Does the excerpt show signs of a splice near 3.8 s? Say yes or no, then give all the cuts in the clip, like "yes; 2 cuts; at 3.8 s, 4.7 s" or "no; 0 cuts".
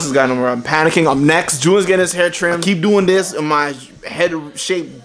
no; 1 cut; at 2.6 s